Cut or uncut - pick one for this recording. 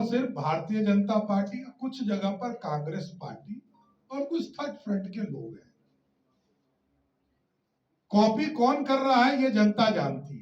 uncut